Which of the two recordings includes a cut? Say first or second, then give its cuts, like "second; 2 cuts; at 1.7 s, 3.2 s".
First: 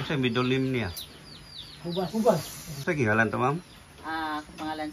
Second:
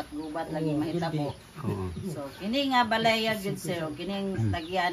first; 1 cut; at 2.7 s